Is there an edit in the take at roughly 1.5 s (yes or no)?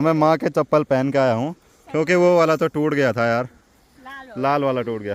no